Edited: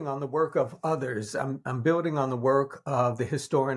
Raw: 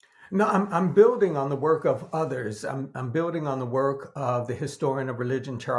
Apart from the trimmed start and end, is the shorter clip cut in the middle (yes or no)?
no